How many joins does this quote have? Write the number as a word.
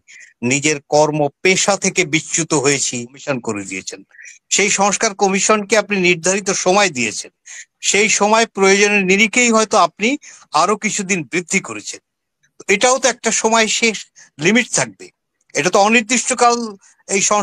one